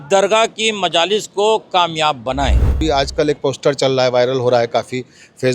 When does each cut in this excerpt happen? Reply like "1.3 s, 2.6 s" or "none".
2.8 s

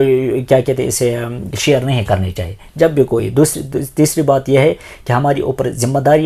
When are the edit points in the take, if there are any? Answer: none

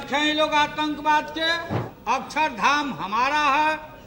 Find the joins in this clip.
1.9 s

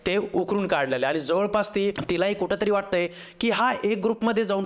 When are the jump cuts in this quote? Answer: 2.0 s

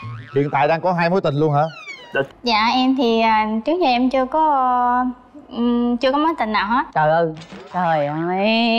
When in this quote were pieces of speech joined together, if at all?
2.3 s

